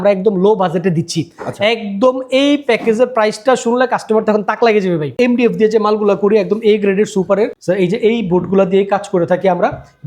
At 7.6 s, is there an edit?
yes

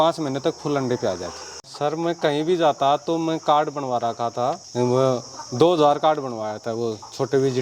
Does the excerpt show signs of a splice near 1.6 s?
yes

